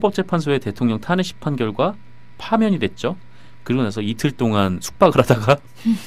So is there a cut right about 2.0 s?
no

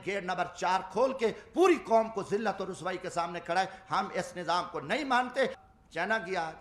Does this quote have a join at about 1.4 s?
no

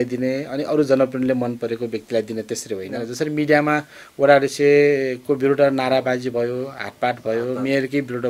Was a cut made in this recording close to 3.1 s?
yes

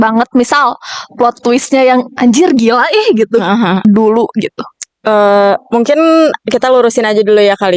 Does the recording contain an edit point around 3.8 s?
yes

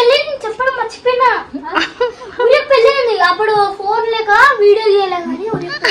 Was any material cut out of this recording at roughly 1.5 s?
no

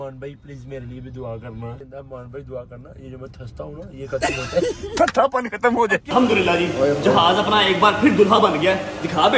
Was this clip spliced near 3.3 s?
no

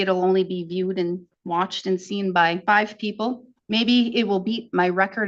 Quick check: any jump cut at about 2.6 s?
yes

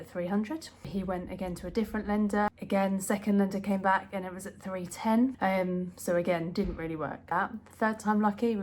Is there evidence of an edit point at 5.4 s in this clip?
yes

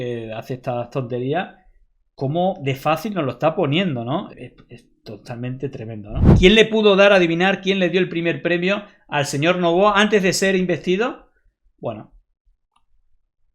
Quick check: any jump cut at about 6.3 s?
yes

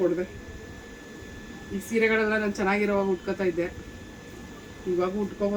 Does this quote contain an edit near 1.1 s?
no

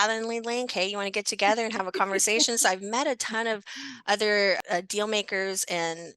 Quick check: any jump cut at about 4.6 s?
yes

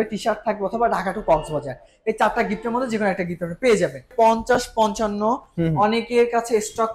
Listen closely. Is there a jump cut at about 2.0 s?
no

